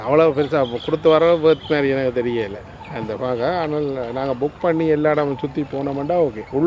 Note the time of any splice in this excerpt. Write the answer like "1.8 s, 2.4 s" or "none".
none